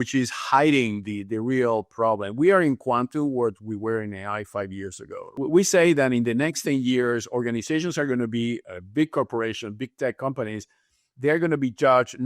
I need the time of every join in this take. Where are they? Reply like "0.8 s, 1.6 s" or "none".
5.5 s